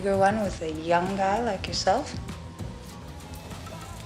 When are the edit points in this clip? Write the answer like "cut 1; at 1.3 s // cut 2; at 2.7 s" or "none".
none